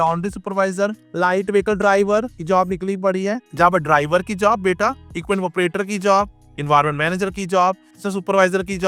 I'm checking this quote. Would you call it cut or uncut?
cut